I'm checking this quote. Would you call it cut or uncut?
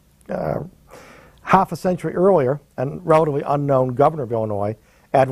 cut